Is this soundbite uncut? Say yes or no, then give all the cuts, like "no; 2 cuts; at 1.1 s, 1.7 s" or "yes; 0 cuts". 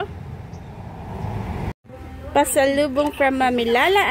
no; 1 cut; at 1.8 s